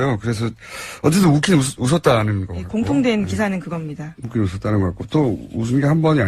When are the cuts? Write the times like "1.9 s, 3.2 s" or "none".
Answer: 3.1 s